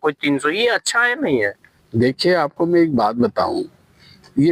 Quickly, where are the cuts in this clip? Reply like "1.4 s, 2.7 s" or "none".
none